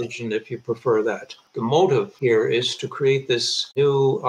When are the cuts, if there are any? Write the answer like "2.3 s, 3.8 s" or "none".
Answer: 1.5 s, 2.1 s